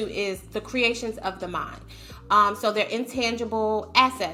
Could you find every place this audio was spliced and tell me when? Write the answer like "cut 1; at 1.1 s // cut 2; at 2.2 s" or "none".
none